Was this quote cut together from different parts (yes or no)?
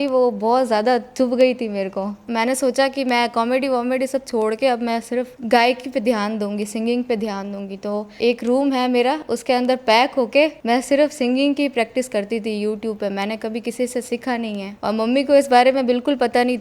no